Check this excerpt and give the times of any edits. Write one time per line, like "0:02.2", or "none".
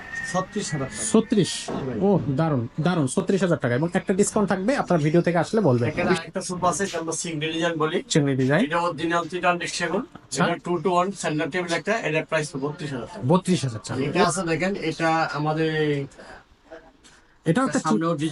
0:06.2
0:14.2